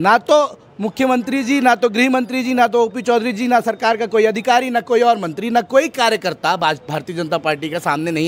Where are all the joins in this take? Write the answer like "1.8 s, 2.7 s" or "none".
none